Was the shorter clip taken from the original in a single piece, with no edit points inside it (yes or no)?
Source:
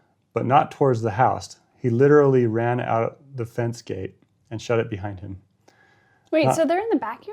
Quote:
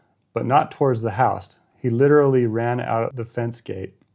no